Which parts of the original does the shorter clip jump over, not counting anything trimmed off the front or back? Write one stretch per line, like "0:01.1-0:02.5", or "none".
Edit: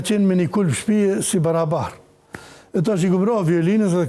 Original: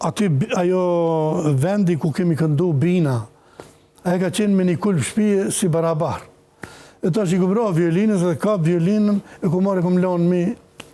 none